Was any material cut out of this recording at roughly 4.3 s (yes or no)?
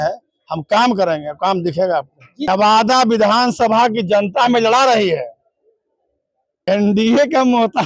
no